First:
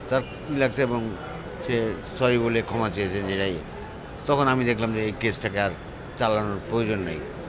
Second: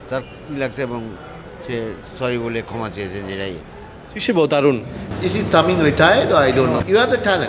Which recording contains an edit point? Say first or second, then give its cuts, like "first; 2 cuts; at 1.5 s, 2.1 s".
second; 1 cut; at 4.2 s